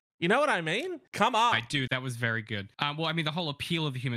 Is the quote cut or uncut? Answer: cut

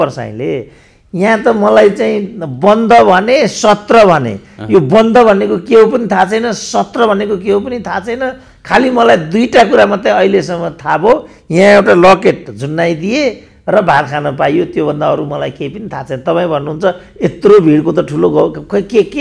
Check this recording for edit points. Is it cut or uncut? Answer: uncut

